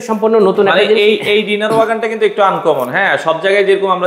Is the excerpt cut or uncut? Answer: uncut